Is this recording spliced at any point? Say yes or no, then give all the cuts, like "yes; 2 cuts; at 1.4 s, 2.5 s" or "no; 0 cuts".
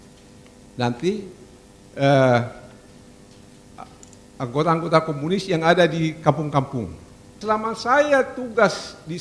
yes; 1 cut; at 7.4 s